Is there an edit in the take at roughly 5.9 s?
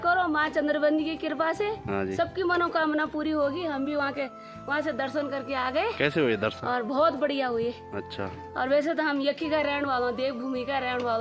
no; 0 cuts

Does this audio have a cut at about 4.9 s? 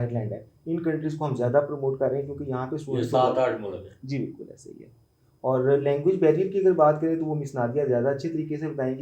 no; 0 cuts

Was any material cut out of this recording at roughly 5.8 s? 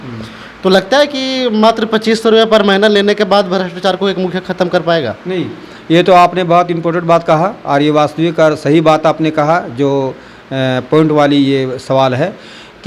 no; 0 cuts

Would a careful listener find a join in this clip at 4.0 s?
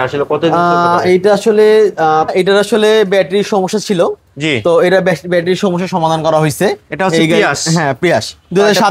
no; 1 cut; at 2.1 s

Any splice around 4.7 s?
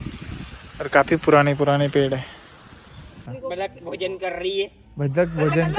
no; 1 cut; at 3.2 s

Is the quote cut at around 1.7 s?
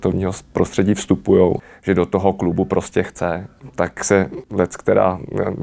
yes; 3 cuts; at 1.7 s, 3.5 s, 4.4 s

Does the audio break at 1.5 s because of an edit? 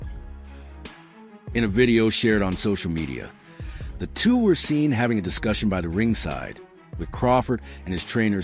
yes; 1 cut; at 1.5 s

